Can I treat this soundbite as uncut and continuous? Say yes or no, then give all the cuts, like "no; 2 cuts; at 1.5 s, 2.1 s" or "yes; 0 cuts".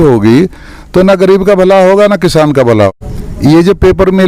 no; 1 cut; at 2.9 s